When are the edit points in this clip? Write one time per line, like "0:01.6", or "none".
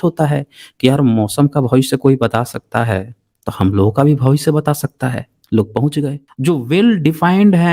0:06.2